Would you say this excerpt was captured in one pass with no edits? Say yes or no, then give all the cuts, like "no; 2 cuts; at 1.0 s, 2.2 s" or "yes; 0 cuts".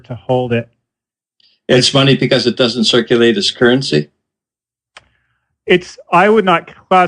no; 1 cut; at 5.5 s